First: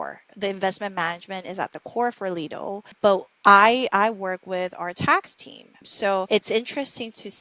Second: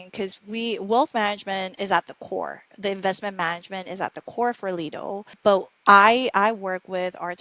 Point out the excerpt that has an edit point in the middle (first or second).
first